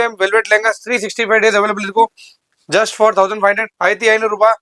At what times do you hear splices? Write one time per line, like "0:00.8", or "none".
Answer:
0:03.7